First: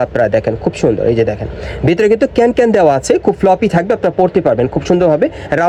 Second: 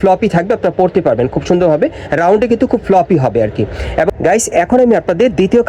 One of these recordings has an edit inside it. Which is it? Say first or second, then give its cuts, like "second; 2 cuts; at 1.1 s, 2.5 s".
second; 1 cut; at 4.1 s